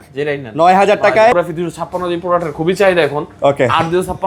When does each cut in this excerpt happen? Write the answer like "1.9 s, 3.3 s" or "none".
1.3 s